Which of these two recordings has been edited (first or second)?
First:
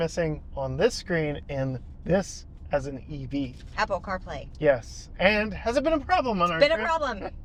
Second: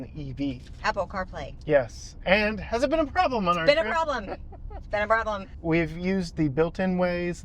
second